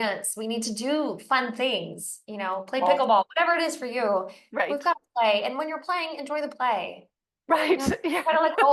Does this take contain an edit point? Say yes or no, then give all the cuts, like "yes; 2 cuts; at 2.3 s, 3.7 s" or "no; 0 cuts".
no; 0 cuts